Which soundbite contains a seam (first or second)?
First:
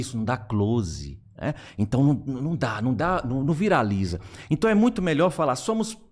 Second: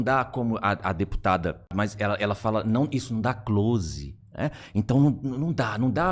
second